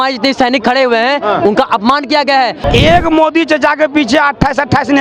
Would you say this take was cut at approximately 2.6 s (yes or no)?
yes